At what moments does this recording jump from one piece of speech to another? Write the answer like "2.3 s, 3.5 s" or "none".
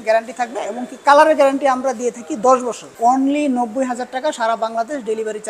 2.9 s